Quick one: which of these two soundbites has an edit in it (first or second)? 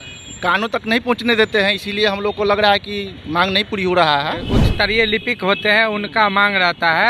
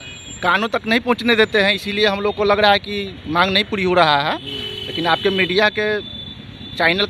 first